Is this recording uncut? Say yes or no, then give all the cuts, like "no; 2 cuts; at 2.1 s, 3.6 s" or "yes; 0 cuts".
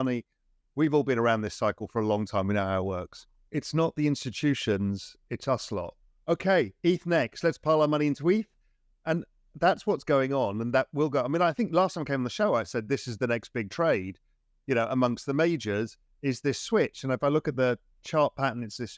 no; 1 cut; at 6.1 s